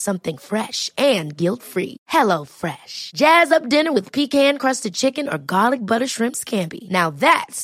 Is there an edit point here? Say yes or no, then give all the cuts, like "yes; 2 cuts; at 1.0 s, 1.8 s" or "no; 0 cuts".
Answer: no; 0 cuts